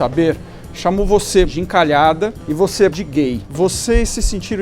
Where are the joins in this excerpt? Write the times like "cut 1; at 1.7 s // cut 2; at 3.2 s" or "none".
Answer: cut 1; at 1.5 s // cut 2; at 2.9 s